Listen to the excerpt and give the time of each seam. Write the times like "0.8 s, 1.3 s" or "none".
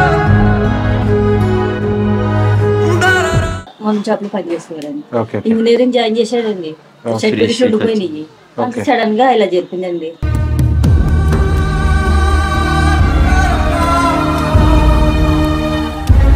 3.8 s